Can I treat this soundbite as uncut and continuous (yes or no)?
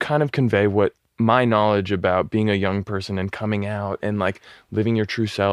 no